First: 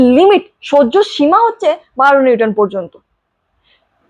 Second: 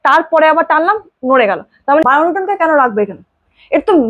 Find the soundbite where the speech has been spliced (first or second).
second